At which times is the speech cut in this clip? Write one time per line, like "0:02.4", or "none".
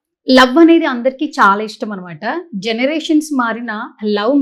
none